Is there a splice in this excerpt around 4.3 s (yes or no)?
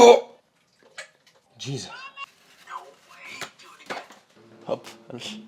yes